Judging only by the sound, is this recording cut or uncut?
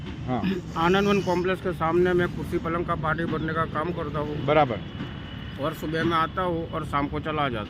uncut